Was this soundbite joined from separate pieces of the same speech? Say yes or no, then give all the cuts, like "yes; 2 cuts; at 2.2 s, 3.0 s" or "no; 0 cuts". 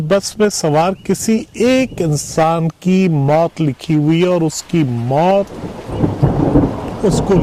no; 0 cuts